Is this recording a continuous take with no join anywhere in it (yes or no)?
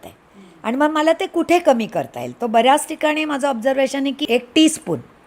no